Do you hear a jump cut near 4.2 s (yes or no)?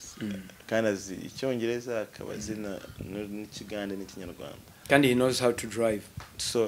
no